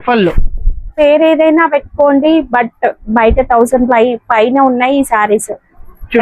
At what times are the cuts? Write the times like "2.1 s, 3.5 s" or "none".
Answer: 0.9 s